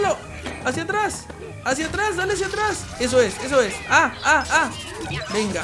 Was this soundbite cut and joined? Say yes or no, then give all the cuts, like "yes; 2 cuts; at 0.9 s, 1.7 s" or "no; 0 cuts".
no; 0 cuts